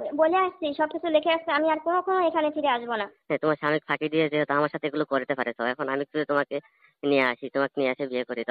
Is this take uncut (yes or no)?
no